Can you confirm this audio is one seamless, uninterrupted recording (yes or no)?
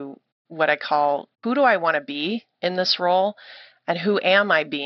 no